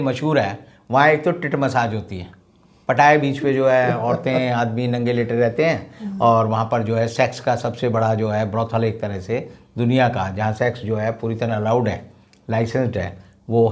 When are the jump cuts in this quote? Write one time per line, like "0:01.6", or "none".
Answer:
none